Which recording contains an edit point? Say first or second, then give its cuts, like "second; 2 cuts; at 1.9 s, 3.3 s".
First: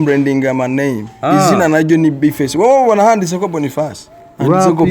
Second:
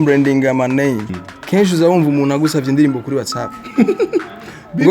second; 1 cut; at 1.1 s